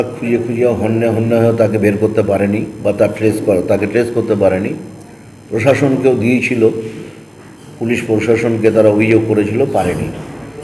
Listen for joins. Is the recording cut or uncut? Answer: uncut